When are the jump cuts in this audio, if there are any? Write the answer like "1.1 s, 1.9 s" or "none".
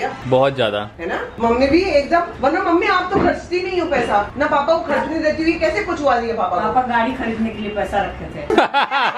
none